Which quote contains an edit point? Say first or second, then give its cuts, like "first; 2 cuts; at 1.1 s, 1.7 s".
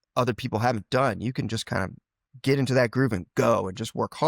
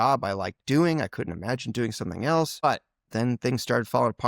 second; 1 cut; at 2.6 s